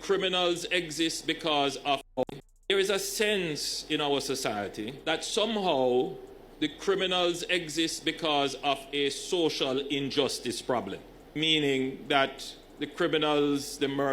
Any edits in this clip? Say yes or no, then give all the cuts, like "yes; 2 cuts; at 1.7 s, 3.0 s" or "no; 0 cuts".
yes; 2 cuts; at 2.1 s, 11.5 s